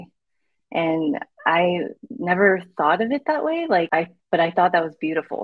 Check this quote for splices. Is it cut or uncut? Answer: cut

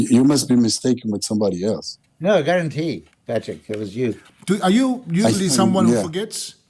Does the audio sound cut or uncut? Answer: cut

